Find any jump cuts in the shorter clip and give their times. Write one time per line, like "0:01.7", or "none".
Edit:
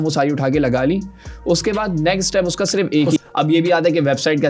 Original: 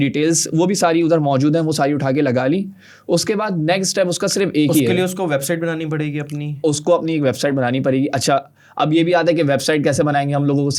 0:03.2